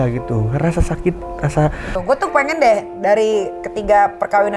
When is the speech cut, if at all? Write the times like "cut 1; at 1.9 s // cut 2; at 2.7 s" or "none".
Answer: cut 1; at 1.9 s